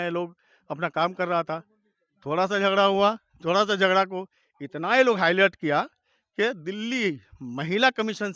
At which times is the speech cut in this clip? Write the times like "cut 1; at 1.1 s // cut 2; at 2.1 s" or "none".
none